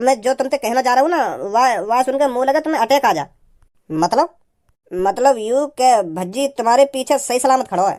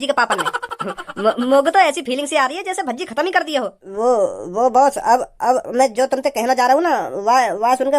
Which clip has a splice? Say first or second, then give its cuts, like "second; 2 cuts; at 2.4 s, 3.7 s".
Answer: second; 1 cut; at 3.8 s